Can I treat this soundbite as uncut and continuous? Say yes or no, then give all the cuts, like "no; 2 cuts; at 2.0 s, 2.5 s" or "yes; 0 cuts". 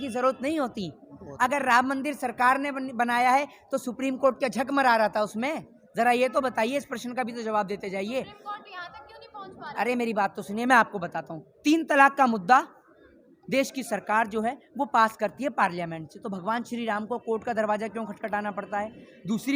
yes; 0 cuts